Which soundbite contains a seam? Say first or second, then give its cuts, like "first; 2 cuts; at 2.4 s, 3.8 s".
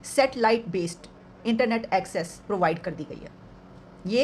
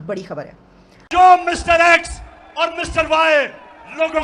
second; 1 cut; at 1.0 s